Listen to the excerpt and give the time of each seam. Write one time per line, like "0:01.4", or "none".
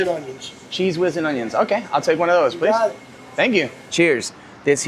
0:03.8